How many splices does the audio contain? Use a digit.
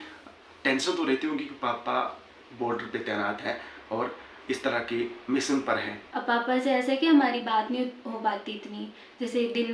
1